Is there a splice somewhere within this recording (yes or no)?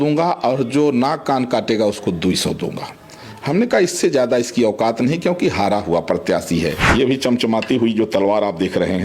yes